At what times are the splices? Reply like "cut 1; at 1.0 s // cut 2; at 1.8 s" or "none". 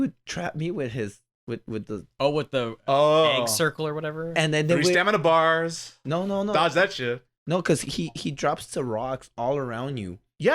none